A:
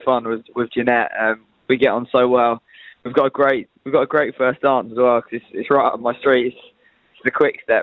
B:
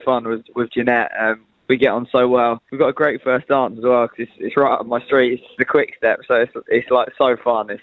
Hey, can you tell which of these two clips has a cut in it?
B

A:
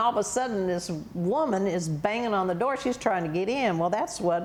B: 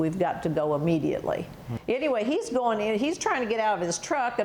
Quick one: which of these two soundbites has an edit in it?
B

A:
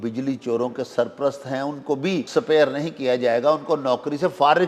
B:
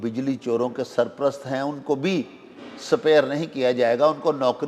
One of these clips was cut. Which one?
A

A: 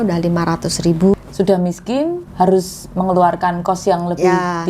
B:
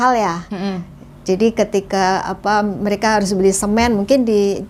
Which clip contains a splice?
A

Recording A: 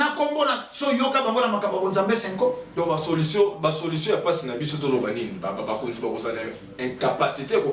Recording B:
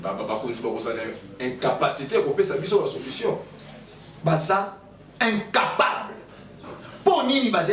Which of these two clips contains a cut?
A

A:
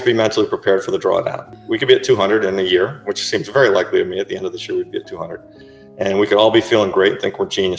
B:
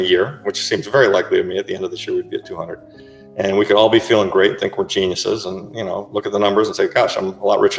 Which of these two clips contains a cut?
A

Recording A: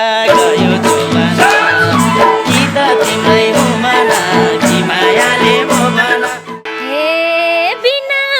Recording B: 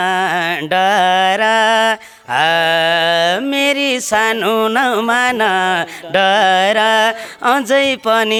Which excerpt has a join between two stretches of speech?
A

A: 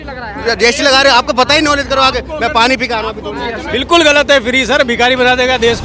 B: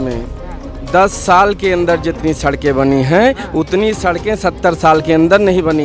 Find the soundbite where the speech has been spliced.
A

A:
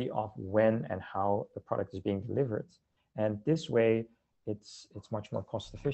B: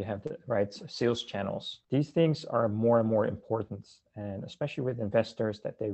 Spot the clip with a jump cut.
B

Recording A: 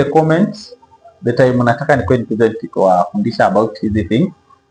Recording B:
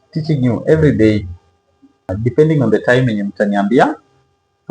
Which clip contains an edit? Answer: B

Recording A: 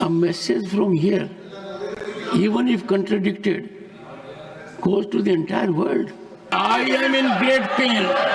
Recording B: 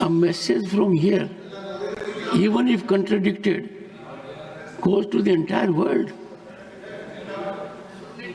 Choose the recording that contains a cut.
A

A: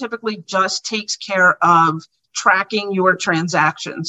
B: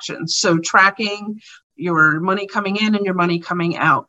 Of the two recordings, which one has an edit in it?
B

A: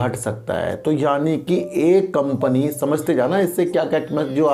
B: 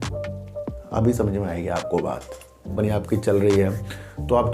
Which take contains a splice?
B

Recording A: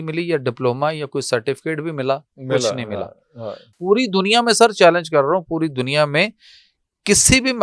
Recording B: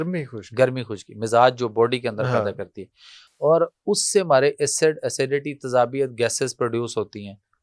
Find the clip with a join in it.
A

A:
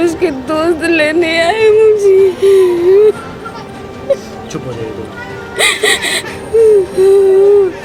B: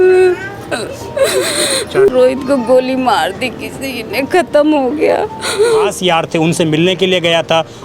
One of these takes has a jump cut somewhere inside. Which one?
B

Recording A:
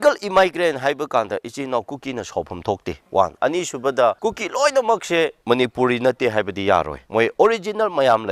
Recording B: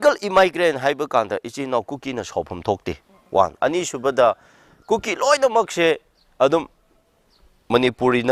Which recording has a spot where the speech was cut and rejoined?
A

